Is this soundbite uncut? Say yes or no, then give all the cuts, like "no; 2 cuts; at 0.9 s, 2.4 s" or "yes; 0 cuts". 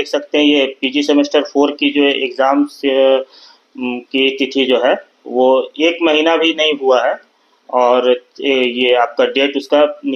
yes; 0 cuts